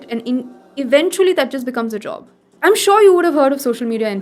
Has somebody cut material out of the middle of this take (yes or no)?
yes